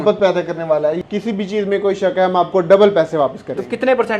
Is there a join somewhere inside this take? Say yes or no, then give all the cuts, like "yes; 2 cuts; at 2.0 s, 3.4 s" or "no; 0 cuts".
yes; 1 cut; at 1.0 s